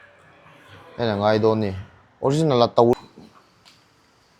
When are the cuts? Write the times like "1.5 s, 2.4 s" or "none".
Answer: 2.9 s